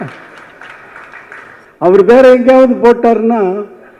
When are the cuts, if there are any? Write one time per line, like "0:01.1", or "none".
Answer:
0:01.6